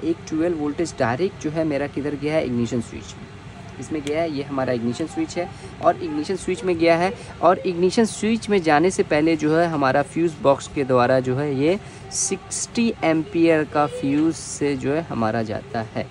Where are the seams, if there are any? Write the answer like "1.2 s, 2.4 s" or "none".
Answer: none